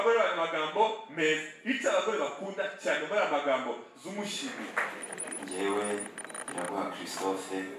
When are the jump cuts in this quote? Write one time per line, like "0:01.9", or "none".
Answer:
0:04.7